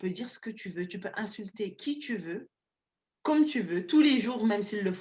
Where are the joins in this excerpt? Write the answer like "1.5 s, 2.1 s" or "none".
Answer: none